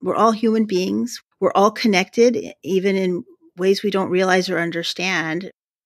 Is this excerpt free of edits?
yes; 0 cuts

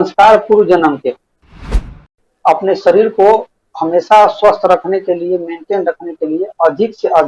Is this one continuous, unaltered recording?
no; 1 cut; at 1.7 s

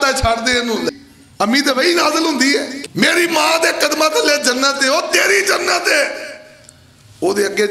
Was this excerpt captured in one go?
no; 2 cuts; at 0.9 s, 2.7 s

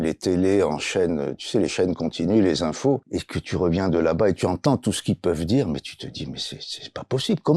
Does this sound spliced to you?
yes; 1 cut; at 3.1 s

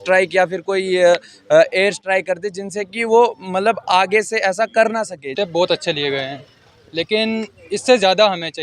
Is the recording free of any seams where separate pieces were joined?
no; 1 cut; at 5.3 s

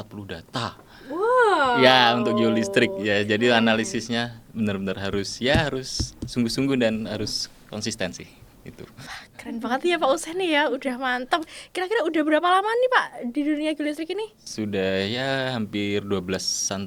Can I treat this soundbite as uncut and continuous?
yes; 0 cuts

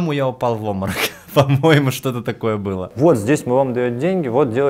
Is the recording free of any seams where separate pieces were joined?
no; 1 cut; at 2.8 s

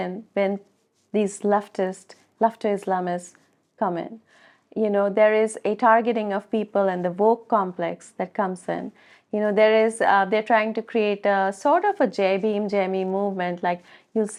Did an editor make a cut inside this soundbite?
no; 0 cuts

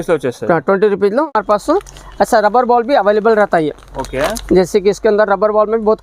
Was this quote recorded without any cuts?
no; 1 cut; at 1.3 s

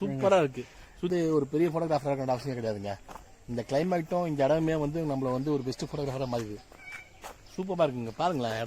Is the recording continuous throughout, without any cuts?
no; 1 cut; at 1.1 s

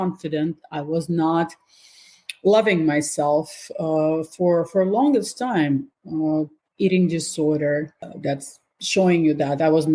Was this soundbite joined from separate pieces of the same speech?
no; 0 cuts

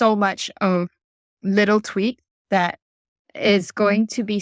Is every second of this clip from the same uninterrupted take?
yes; 0 cuts

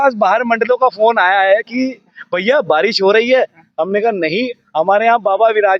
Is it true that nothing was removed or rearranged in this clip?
yes; 0 cuts

